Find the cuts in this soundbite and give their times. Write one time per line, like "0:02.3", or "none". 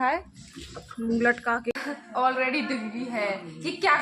0:01.7